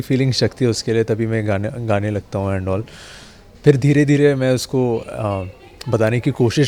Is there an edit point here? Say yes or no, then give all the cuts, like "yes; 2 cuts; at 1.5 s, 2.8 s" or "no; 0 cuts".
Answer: no; 0 cuts